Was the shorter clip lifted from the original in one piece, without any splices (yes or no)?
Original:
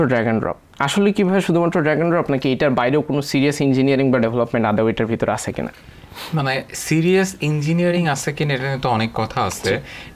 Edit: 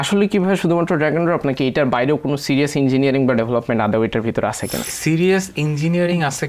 no